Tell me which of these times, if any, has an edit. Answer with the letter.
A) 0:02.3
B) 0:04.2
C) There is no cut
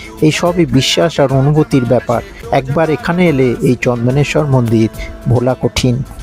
A